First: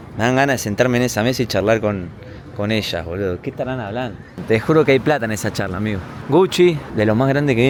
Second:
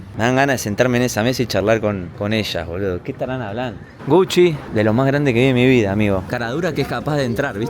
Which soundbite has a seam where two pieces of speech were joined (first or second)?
second